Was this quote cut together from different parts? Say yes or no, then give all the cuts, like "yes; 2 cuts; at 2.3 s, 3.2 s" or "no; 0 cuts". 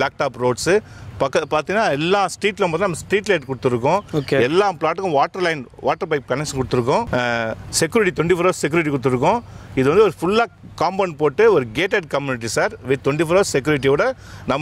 no; 0 cuts